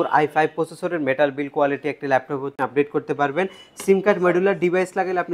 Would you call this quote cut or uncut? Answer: cut